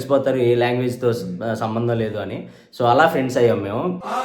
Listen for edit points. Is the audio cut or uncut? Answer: uncut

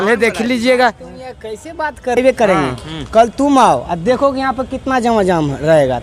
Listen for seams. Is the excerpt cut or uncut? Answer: cut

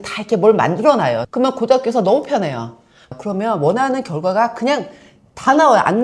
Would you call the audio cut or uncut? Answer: cut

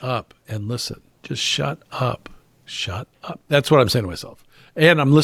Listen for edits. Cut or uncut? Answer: uncut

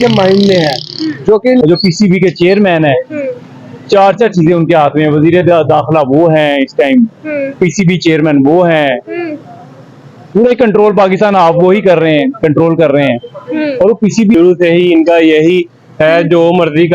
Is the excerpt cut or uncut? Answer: cut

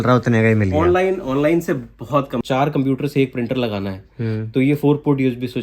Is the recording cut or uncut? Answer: cut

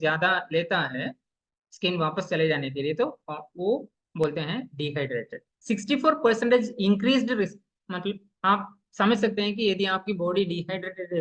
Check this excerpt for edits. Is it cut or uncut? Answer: cut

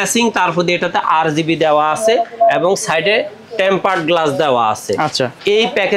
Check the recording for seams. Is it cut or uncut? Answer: uncut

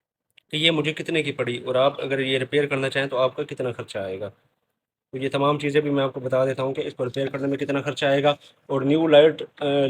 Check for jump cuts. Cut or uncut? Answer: uncut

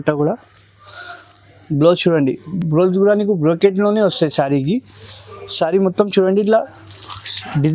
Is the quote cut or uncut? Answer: uncut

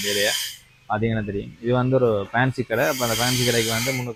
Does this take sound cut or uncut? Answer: uncut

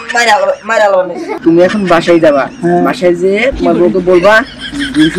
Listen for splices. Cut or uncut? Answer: cut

